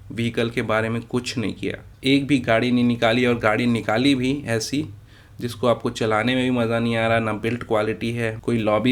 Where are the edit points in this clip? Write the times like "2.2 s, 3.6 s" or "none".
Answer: none